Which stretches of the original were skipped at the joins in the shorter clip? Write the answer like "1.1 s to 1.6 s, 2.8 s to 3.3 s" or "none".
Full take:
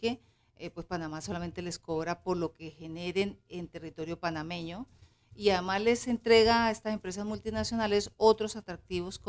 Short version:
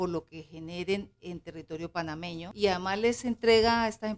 4.8 s to 5.3 s